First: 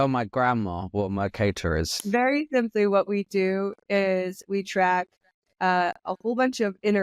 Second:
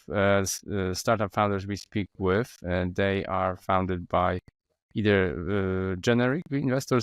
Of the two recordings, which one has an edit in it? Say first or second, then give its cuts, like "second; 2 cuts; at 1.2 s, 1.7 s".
first; 1 cut; at 2.0 s